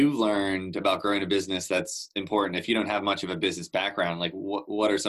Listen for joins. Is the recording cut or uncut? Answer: uncut